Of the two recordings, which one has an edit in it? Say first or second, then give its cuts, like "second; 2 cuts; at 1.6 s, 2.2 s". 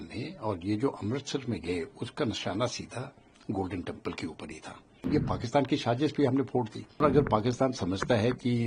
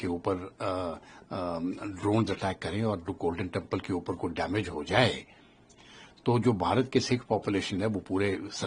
first; 2 cuts; at 5.0 s, 7.0 s